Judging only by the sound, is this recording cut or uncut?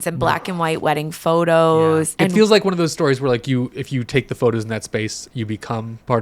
cut